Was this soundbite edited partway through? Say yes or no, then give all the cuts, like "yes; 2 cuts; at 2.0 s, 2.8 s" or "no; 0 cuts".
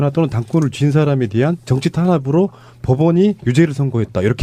yes; 1 cut; at 3.0 s